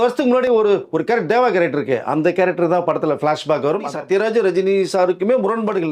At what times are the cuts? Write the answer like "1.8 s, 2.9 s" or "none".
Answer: 3.9 s